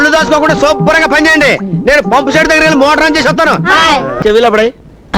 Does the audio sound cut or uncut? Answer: cut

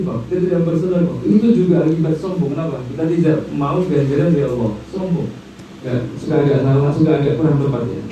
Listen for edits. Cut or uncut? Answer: cut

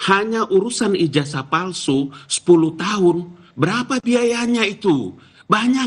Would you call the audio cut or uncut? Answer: uncut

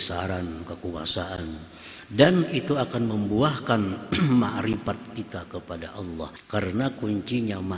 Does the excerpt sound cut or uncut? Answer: cut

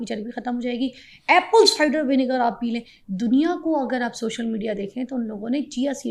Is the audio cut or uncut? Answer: uncut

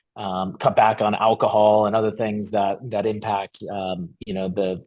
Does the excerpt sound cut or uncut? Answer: uncut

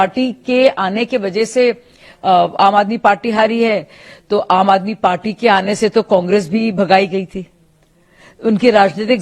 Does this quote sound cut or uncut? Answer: uncut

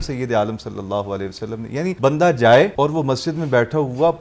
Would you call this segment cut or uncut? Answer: cut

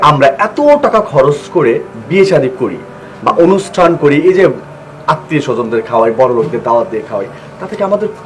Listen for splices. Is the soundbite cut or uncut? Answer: uncut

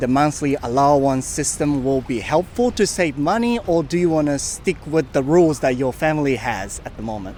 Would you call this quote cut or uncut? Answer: uncut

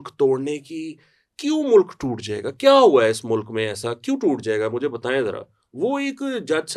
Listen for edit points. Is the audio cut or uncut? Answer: uncut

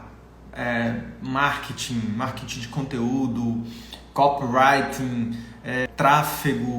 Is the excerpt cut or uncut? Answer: cut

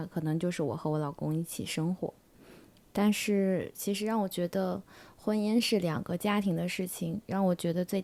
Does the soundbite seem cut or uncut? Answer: uncut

